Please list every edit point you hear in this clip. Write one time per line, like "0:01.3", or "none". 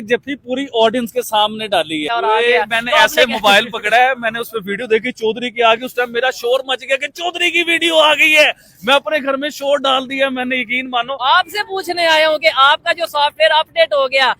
0:02.1
0:11.2